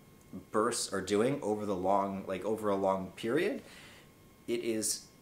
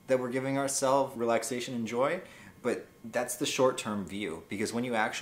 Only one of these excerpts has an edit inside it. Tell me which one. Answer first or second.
second